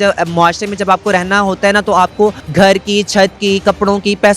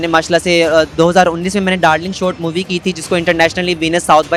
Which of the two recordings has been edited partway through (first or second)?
first